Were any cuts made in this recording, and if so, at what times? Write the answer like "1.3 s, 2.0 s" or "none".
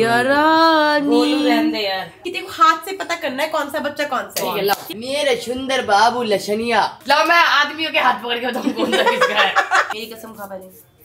2.2 s, 4.9 s, 7.0 s, 9.9 s